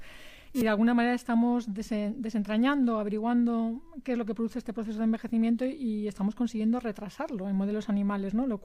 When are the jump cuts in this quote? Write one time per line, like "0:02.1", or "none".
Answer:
none